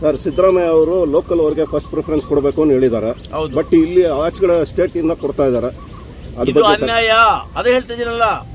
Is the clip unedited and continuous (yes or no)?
yes